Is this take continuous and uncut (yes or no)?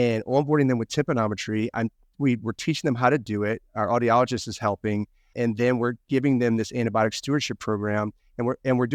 yes